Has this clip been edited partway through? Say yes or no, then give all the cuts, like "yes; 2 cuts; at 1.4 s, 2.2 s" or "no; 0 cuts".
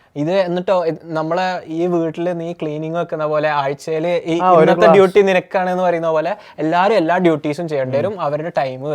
no; 0 cuts